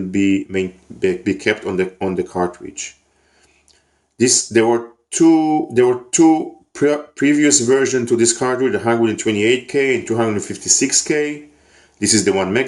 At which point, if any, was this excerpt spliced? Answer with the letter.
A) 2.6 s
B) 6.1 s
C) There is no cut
B